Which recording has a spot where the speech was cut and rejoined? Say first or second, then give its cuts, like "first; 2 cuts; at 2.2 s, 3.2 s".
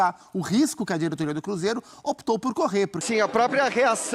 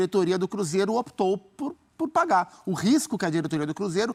first; 1 cut; at 3.0 s